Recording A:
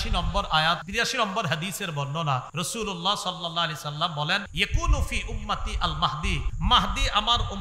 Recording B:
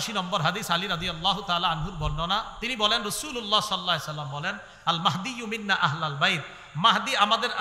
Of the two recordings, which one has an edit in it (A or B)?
A